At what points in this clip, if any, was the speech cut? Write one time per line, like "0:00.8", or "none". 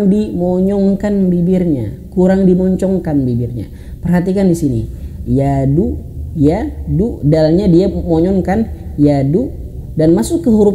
none